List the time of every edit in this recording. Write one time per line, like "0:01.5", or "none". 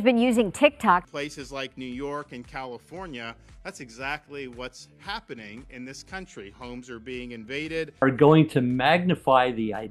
0:01.1
0:07.9